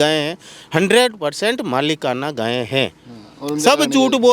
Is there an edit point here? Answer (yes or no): no